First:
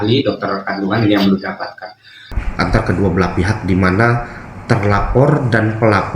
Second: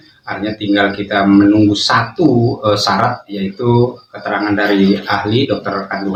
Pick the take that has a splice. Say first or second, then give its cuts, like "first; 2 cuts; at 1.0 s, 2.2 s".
first; 1 cut; at 2.3 s